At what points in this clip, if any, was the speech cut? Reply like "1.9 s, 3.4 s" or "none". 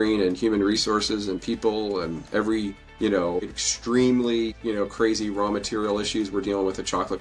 2.8 s, 3.6 s, 4.6 s